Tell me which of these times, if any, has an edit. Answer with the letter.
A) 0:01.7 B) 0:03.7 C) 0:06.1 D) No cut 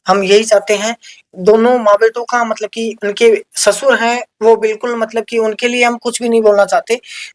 D